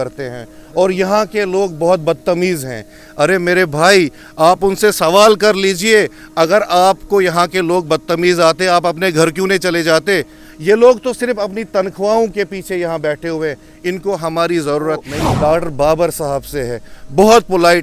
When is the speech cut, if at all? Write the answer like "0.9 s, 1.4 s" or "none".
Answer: 15.2 s